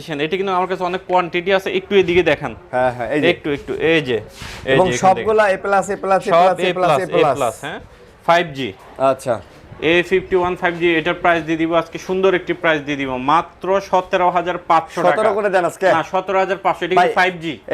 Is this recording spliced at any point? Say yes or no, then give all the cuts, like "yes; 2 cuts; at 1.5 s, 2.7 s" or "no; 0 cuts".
no; 0 cuts